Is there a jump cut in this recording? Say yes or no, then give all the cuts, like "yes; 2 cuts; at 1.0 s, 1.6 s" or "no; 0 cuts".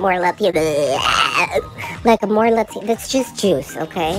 no; 0 cuts